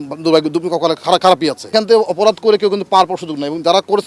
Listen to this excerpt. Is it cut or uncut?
cut